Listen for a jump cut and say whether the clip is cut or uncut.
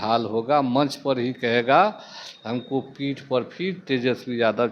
uncut